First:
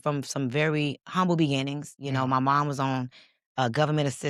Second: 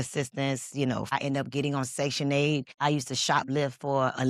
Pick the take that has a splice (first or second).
second